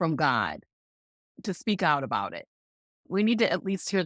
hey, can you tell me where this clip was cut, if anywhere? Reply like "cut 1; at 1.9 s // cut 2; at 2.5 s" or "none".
cut 1; at 1.3 s // cut 2; at 3.0 s